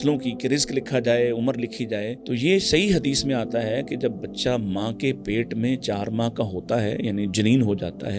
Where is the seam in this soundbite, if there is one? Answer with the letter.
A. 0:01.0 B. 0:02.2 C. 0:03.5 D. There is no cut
B